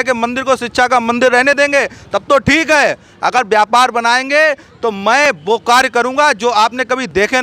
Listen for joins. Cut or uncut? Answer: uncut